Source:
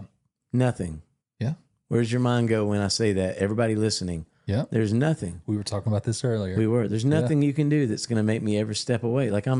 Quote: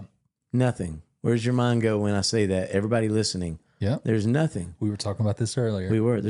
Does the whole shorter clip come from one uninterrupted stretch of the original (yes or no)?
no